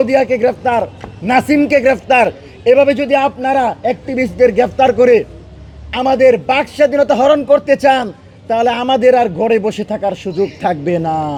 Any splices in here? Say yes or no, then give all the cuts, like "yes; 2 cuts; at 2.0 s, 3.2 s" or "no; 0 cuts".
no; 0 cuts